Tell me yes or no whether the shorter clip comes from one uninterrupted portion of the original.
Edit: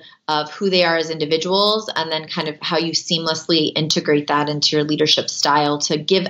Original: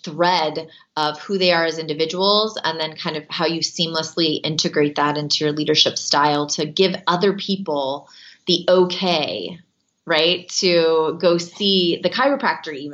yes